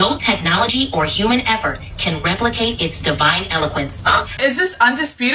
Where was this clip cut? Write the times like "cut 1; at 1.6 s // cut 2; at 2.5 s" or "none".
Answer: cut 1; at 4.3 s

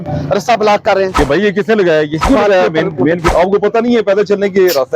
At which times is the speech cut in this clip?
cut 1; at 1.2 s // cut 2; at 2.2 s // cut 3; at 3.3 s

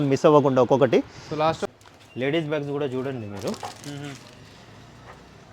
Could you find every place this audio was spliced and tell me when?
cut 1; at 1.6 s

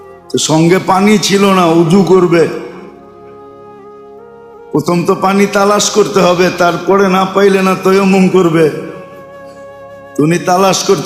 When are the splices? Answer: none

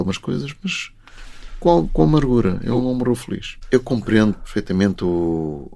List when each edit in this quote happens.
cut 1; at 3.5 s // cut 2; at 4.5 s

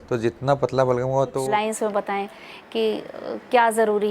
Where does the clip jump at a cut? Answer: cut 1; at 1.4 s

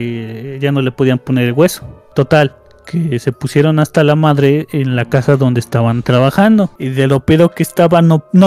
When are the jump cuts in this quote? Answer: cut 1; at 2.0 s // cut 2; at 6.8 s

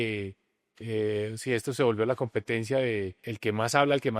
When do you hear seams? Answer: cut 1; at 3.3 s

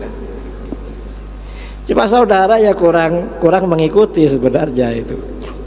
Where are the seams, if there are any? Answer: none

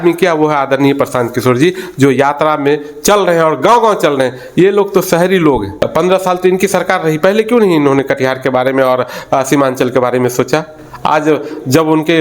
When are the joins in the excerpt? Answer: cut 1; at 5.7 s

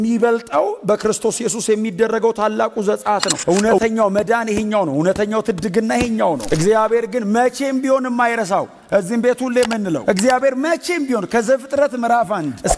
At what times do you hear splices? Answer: cut 1; at 3.4 s // cut 2; at 6.4 s

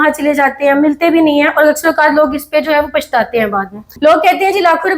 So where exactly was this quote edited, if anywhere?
cut 1; at 4.0 s

